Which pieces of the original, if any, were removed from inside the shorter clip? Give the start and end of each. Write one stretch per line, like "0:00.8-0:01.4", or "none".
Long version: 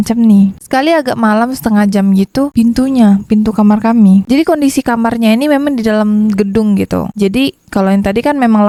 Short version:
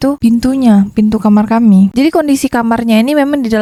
none